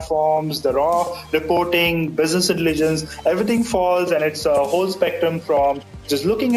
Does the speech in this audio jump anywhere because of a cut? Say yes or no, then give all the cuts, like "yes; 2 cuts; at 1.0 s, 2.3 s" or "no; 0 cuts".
no; 0 cuts